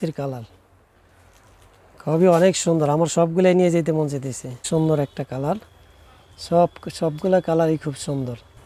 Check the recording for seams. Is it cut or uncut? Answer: cut